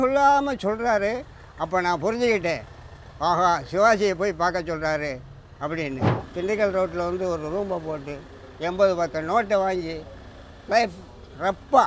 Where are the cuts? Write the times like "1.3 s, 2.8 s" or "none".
6.2 s